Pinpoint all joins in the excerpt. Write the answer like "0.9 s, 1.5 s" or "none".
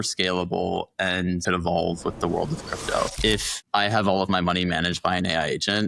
1.4 s, 3.1 s